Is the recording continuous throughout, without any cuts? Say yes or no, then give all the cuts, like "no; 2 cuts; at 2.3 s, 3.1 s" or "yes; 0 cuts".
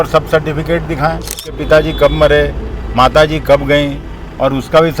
no; 1 cut; at 1.5 s